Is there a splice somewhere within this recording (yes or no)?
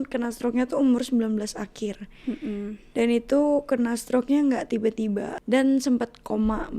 yes